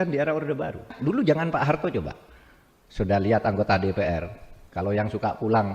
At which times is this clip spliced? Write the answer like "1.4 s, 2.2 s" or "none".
0.9 s